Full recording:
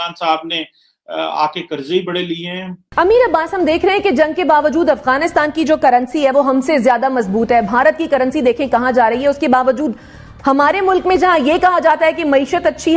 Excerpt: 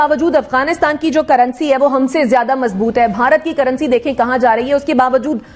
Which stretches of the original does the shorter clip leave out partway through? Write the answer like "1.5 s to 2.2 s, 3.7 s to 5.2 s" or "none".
none

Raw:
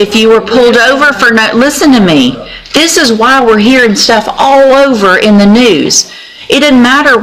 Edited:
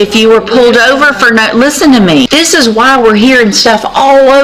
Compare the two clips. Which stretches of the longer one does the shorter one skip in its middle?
2.3 s to 2.7 s

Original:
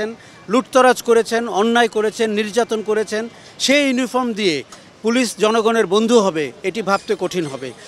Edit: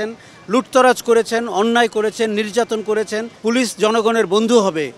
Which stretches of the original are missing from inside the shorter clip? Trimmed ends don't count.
3.3 s to 4.9 s

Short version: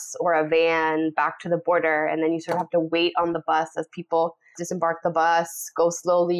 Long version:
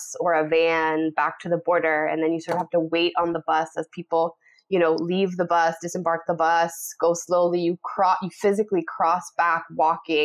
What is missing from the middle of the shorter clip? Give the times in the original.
4.6 s to 5.8 s

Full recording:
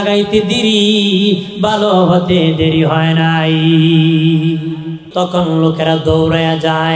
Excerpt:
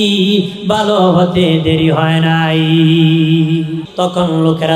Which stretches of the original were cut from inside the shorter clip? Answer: 4.7 s to 5.0 s

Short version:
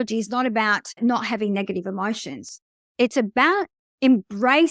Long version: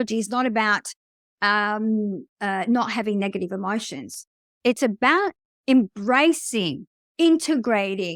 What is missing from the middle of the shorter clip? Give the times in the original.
1.0 s to 2.6 s

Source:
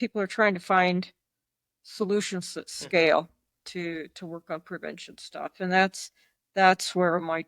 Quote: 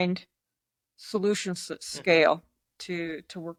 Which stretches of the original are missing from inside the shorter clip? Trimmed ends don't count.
none

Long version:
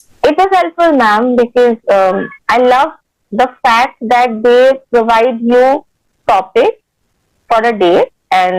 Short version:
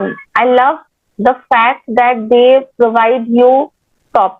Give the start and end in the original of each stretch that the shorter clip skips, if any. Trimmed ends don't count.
none

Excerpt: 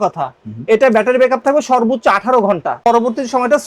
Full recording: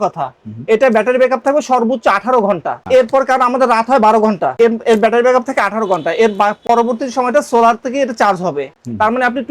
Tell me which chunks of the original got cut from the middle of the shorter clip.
2.8 s to 6.6 s

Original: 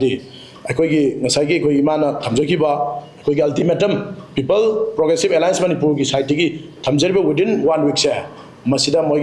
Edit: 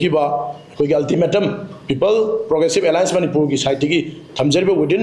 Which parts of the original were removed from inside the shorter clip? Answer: none

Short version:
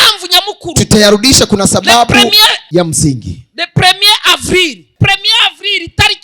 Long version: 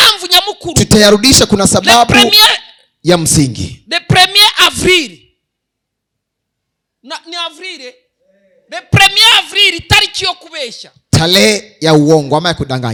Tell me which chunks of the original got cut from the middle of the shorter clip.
2.6 s to 2.9 s, 5.2 s to 8.8 s

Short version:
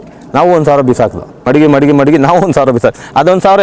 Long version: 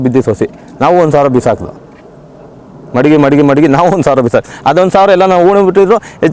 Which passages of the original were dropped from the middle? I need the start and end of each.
1.7 s to 2.8 s

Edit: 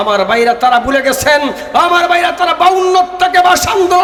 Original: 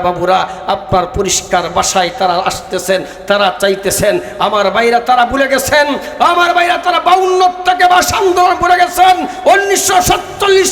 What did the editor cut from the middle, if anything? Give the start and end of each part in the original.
none

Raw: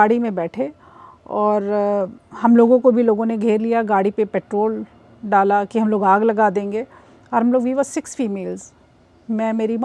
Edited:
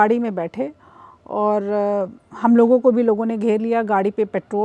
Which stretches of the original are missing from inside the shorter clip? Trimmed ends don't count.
none

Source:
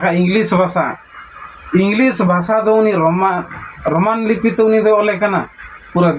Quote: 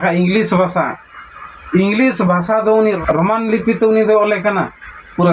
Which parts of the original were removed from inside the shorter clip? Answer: 3.0 s to 3.7 s

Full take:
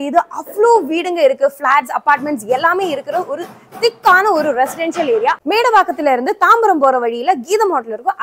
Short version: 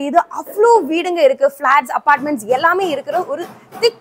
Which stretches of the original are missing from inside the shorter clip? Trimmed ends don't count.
none

